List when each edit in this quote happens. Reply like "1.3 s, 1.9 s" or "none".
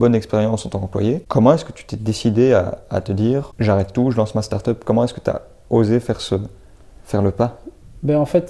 1.2 s, 3.5 s